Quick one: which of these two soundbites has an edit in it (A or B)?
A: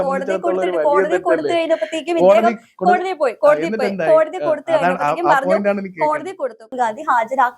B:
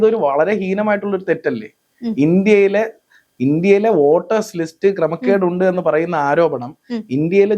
A